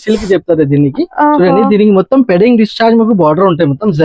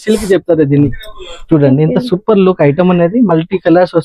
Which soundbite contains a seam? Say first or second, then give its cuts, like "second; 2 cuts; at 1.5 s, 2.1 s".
second; 1 cut; at 0.9 s